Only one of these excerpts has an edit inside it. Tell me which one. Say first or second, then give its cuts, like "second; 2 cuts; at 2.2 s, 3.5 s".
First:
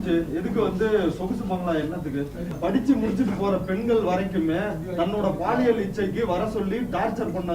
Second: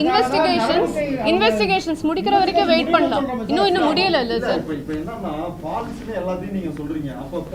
first; 1 cut; at 2.5 s